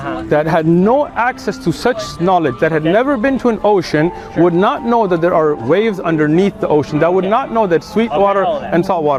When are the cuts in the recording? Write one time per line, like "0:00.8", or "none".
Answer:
none

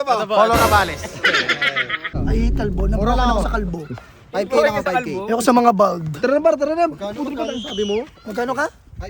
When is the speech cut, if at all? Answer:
0:02.2

